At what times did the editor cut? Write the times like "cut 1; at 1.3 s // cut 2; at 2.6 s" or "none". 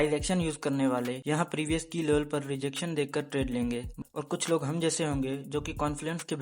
cut 1; at 1.2 s // cut 2; at 4.0 s